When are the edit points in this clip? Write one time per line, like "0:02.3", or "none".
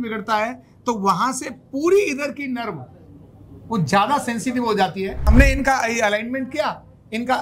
0:05.3